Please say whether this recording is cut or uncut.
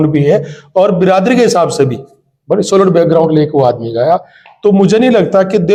uncut